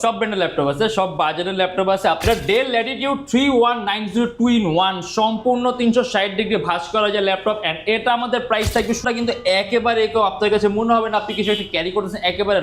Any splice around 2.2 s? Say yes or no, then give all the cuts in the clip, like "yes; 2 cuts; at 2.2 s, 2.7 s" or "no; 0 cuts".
yes; 2 cuts; at 2.2 s, 9.0 s